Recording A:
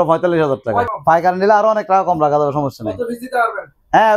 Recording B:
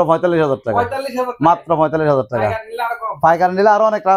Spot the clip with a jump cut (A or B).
A